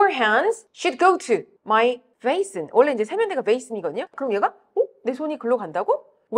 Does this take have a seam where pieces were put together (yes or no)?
yes